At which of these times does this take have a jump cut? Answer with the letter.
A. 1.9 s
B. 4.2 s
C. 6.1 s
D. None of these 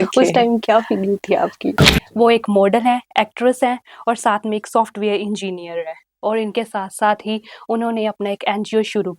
A